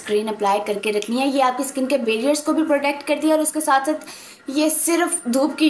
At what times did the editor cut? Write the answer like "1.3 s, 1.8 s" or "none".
none